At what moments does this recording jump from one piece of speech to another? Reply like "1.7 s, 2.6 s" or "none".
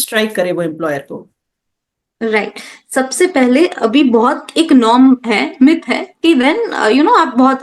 none